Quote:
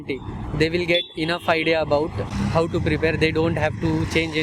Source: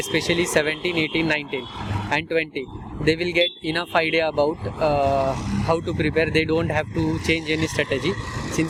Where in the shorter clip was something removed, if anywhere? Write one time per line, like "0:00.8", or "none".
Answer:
0:02.3